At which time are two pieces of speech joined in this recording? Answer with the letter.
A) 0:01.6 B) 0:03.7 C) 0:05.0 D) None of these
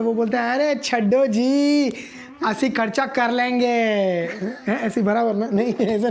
D